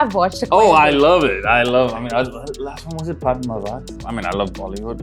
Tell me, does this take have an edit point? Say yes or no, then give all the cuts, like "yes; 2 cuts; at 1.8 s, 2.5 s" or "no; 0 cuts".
yes; 1 cut; at 4.1 s